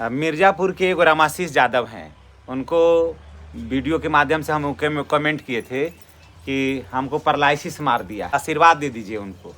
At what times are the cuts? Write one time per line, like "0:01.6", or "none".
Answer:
0:08.3